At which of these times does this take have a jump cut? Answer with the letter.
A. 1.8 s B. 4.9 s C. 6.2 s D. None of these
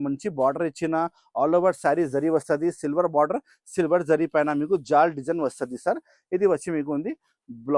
D